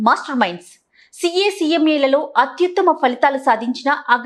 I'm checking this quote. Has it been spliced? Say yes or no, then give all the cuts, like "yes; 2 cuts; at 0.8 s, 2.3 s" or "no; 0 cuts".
no; 0 cuts